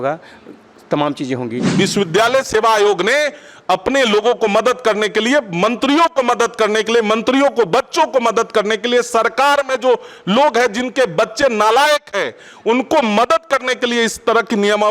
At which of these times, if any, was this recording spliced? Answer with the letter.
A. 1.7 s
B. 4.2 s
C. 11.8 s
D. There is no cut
A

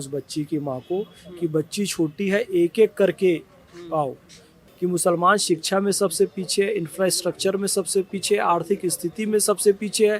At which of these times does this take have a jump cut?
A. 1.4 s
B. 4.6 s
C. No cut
B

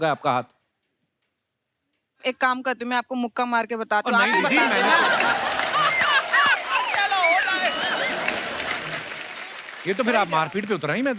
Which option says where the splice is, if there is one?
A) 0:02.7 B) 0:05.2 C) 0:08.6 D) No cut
D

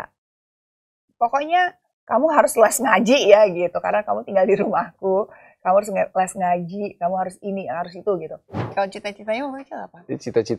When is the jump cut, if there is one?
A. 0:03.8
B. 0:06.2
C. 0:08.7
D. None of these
C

